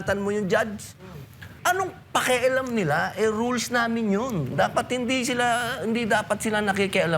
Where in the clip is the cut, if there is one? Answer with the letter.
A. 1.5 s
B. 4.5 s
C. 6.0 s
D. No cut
A